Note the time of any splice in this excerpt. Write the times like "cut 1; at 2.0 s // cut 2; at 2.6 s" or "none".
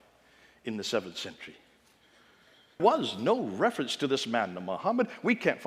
cut 1; at 2.8 s